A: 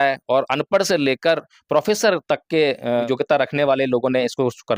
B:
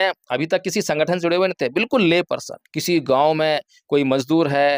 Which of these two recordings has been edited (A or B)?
A